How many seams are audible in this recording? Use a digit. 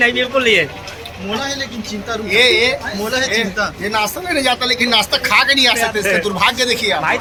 0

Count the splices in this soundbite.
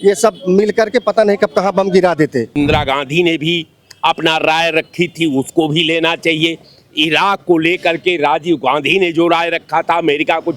1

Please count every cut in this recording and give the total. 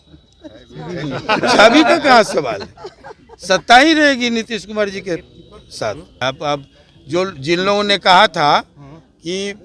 1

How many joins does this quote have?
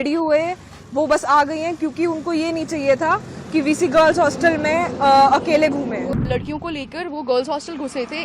1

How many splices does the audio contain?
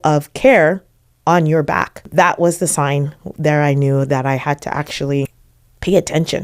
2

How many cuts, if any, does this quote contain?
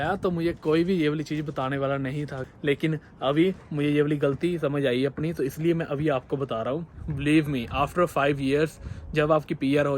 2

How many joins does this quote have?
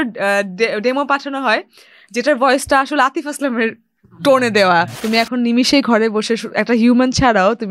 1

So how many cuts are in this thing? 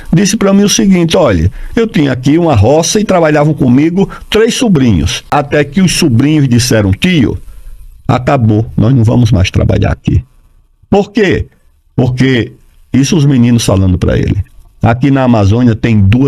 1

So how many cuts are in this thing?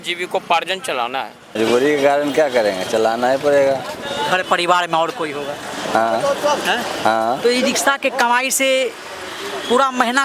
1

